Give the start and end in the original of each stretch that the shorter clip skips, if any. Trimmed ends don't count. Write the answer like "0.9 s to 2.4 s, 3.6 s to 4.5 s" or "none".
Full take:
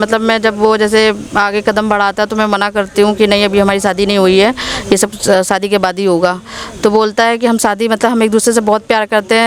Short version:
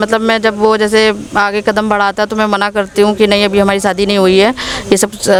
none

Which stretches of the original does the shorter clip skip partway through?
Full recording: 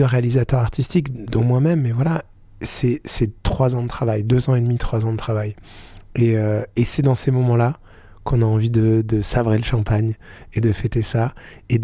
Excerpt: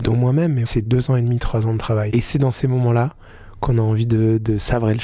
2.0 s to 4.2 s, 5.5 s to 6.7 s

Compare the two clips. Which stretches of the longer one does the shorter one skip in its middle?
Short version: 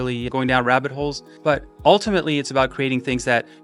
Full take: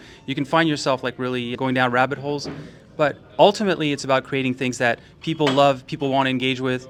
2.5 s to 2.8 s

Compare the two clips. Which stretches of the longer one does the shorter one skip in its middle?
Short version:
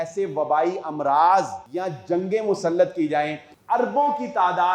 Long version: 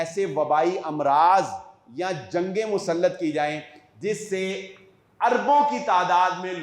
1.6 s to 1.9 s, 3.7 s to 5.0 s

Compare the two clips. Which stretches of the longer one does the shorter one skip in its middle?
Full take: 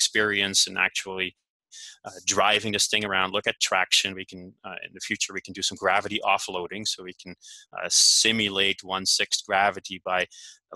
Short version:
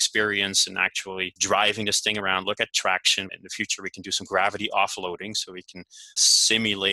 1.4 s to 2.2 s, 4.2 s to 4.9 s, 7.7 s to 7.9 s

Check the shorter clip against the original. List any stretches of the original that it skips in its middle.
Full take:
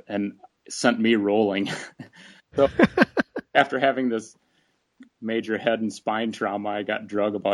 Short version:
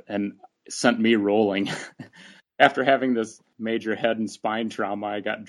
2.4 s to 3.4 s, 4.4 s to 5.1 s

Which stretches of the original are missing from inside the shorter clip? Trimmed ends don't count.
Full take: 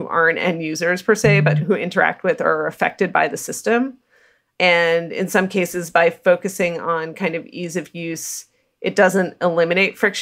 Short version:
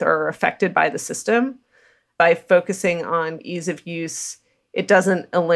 4.4 s to 5.8 s, 7.1 s to 7.5 s

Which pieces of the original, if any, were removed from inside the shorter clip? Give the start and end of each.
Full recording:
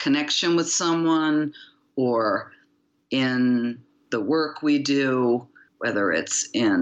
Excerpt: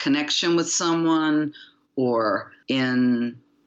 2.5 s to 3.0 s

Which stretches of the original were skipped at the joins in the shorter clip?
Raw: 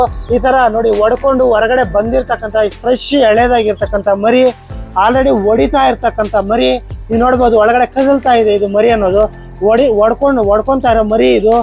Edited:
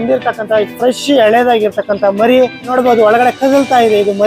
4.7 s to 7.3 s

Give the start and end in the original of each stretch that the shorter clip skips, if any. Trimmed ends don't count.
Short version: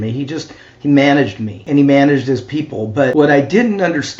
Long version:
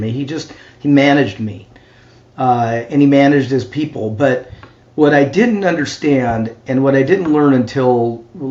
1.6 s to 2.8 s, 4.3 s to 4.9 s

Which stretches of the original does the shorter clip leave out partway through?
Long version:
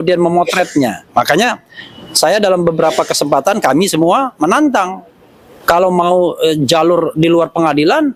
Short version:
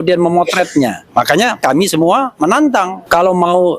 1.6 s to 3.6 s, 5.0 s to 5.5 s

